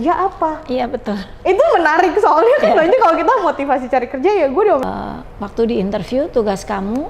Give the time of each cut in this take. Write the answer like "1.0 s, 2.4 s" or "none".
4.8 s